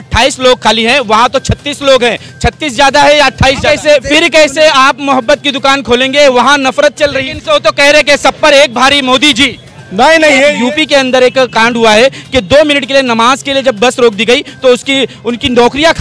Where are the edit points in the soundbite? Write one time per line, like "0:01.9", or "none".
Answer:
0:03.6
0:07.3
0:10.6